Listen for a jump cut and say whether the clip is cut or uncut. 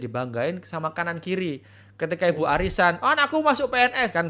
uncut